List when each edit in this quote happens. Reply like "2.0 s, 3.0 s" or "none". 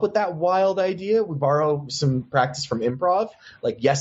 2.3 s